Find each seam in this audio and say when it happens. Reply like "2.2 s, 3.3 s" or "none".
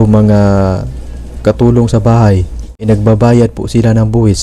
2.9 s

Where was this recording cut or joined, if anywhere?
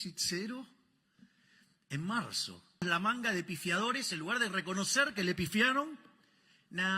2.8 s

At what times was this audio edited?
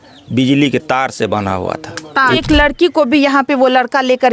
2.4 s

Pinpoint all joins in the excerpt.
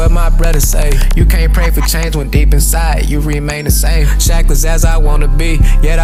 none

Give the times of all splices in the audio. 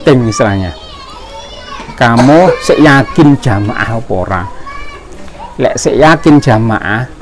none

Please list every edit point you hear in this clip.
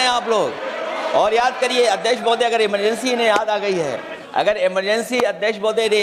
4.1 s

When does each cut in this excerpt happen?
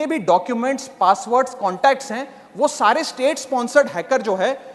none

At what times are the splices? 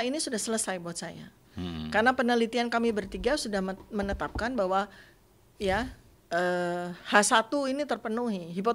none

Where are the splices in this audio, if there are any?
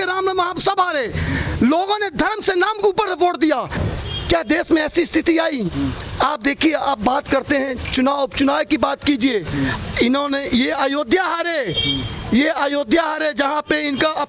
3.7 s

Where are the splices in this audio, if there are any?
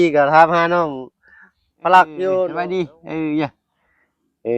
2.5 s

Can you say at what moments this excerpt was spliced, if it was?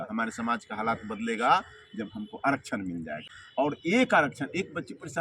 3.6 s

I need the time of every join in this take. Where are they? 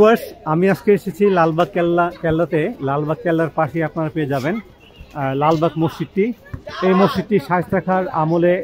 none

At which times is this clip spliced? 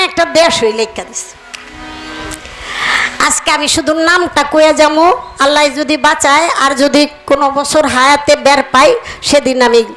none

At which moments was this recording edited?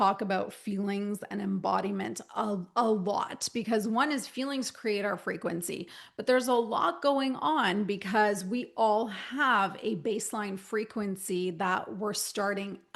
none

